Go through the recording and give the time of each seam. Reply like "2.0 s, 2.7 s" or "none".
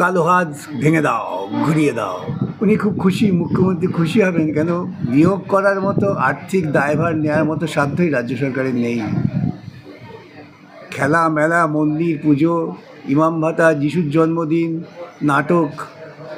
2.2 s